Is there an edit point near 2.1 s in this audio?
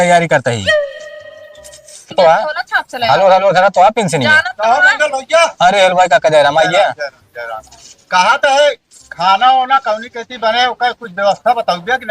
yes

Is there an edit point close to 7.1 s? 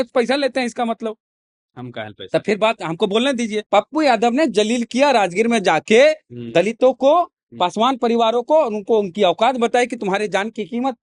no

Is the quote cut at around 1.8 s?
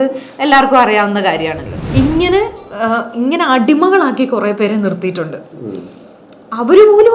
yes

